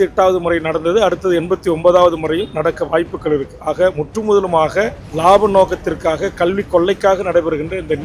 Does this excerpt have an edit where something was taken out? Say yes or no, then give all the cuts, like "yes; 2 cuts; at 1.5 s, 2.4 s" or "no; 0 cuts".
yes; 1 cut; at 5.0 s